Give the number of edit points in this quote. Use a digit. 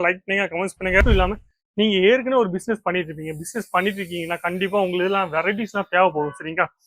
1